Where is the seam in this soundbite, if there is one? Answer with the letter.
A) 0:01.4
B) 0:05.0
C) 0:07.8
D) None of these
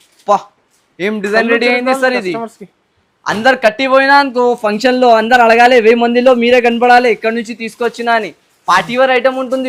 D